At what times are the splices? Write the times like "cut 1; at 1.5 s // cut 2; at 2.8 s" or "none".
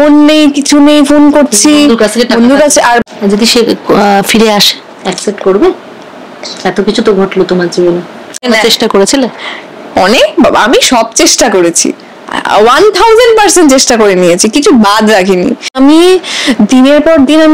cut 1; at 3.1 s // cut 2; at 8.4 s // cut 3; at 15.7 s